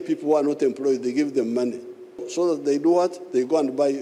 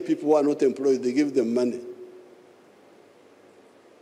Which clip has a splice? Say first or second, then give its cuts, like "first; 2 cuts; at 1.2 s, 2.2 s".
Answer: first; 1 cut; at 2.2 s